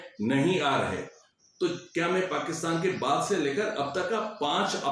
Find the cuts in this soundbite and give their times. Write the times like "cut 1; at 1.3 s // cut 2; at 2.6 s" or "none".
cut 1; at 1.2 s